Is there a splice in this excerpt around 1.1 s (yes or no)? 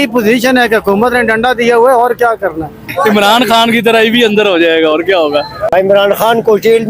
no